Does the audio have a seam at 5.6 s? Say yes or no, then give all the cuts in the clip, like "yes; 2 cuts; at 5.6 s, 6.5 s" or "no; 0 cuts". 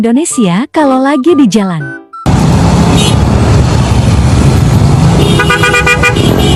no; 0 cuts